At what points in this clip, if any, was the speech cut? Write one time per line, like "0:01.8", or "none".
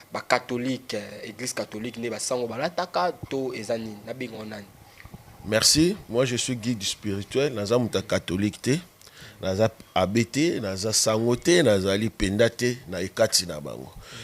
none